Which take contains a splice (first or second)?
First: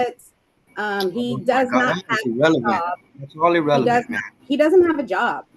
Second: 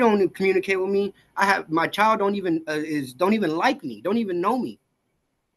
first